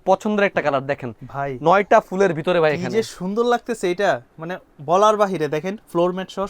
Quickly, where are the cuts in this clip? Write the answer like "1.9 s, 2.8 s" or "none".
none